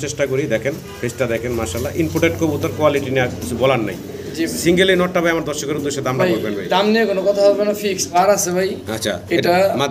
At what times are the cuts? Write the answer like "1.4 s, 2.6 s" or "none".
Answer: 8.1 s

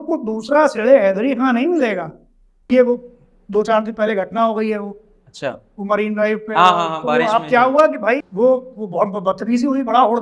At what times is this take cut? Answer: 2.7 s

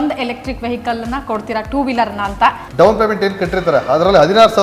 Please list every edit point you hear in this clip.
2.6 s

